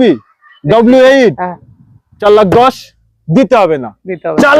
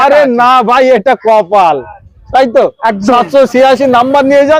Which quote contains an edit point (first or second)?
first